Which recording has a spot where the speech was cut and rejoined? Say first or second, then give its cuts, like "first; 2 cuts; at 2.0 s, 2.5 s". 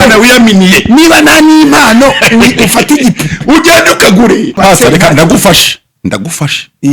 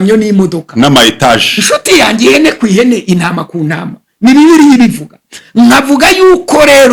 first; 1 cut; at 4.6 s